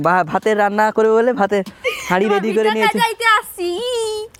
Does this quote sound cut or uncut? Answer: uncut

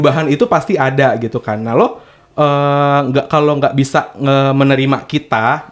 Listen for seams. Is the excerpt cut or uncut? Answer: uncut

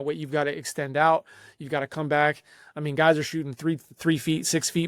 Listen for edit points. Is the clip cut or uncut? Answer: uncut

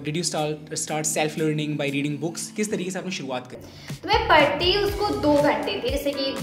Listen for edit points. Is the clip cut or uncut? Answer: cut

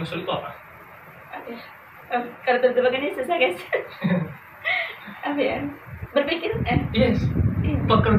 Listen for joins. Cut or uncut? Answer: uncut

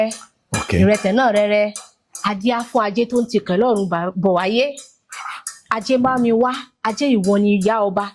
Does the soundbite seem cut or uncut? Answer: uncut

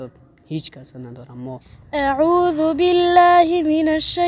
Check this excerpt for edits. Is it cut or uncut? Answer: cut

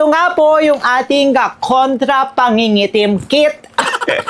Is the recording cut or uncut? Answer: uncut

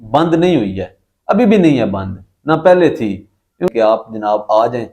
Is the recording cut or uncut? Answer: cut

